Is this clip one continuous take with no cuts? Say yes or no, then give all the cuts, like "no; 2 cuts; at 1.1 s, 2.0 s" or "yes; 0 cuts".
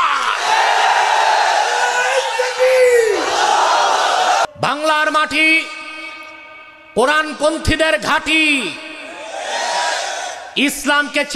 no; 1 cut; at 4.5 s